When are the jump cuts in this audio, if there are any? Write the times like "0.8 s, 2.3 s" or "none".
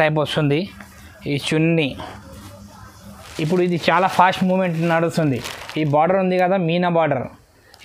3.2 s